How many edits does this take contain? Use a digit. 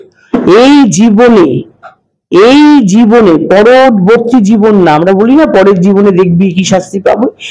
0